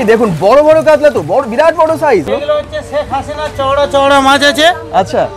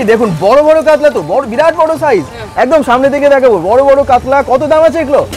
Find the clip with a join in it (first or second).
first